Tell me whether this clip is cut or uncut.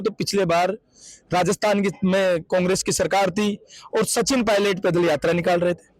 uncut